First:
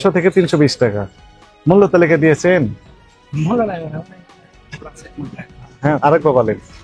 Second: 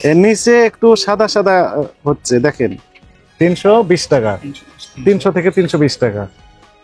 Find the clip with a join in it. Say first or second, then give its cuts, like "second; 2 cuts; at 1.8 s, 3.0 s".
second; 1 cut; at 3.2 s